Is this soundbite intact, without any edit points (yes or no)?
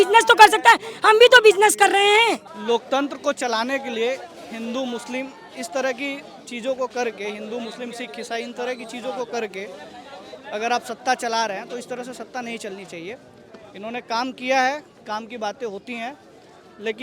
no